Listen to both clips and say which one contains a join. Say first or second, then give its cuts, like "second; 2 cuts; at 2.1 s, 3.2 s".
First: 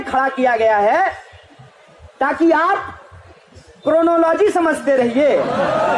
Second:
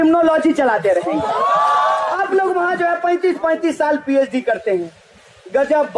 second; 1 cut; at 2.1 s